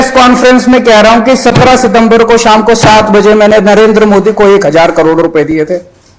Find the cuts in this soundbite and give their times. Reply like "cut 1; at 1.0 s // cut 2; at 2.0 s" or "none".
none